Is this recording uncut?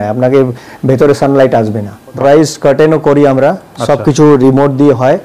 no; 1 cut; at 2.2 s

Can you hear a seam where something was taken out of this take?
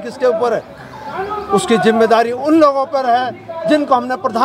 no; 0 cuts

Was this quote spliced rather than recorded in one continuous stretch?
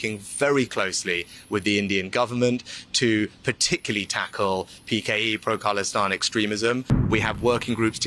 yes; 1 cut; at 7.1 s

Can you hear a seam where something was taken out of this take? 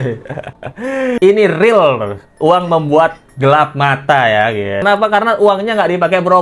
yes; 2 cuts; at 1.2 s, 4.8 s

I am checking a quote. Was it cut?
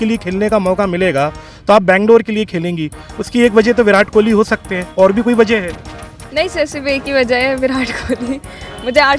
no; 0 cuts

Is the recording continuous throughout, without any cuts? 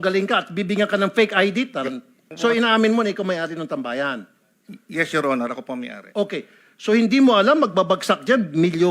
no; 1 cut; at 2.2 s

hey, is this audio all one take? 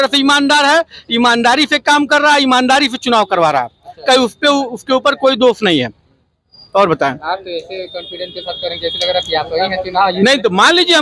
yes; 0 cuts

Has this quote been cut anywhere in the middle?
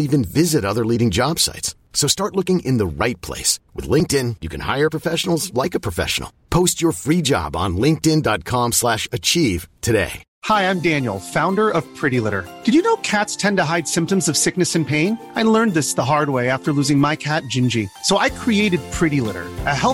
no; 0 cuts

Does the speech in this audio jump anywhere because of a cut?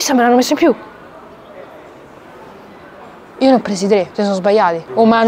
no; 0 cuts

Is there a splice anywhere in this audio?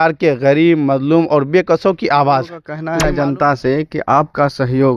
yes; 1 cut; at 2.7 s

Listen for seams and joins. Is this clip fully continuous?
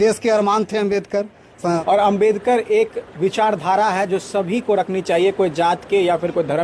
no; 1 cut; at 1.8 s

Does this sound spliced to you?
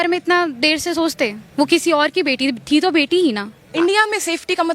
yes; 1 cut; at 3.6 s

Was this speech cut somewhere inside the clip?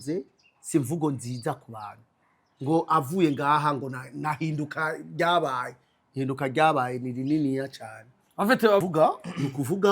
yes; 1 cut; at 8.8 s

